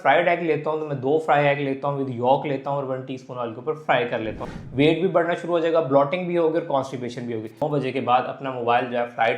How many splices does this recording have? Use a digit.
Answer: 2